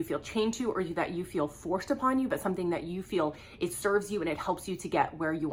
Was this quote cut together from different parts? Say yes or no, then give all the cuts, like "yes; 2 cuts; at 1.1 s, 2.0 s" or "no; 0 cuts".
no; 0 cuts